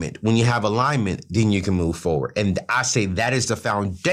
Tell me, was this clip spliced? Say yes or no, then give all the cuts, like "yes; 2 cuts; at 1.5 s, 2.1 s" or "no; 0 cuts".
no; 0 cuts